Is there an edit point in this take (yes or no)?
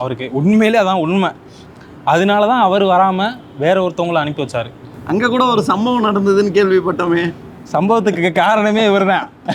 no